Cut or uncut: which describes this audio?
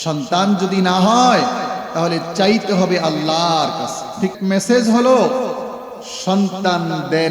cut